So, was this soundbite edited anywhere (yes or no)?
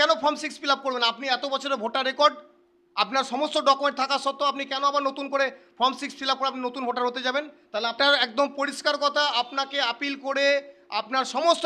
yes